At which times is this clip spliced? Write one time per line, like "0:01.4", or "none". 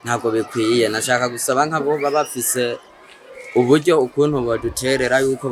none